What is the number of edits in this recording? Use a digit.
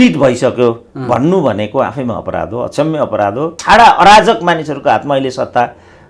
1